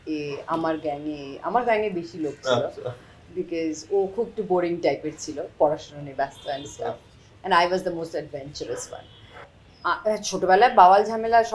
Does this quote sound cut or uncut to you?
uncut